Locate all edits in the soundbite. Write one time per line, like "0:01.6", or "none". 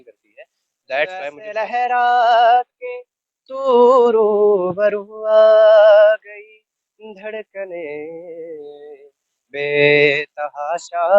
0:01.5